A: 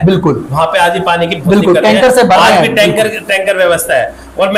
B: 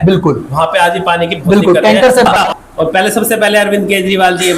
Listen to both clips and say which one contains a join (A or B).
B